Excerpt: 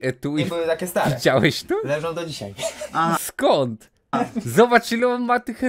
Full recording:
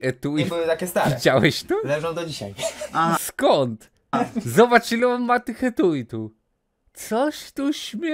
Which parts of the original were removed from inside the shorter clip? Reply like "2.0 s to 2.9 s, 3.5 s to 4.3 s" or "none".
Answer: none